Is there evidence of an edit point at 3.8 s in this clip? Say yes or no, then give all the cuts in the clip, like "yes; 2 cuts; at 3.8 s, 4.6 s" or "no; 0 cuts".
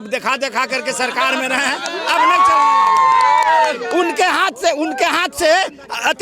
no; 0 cuts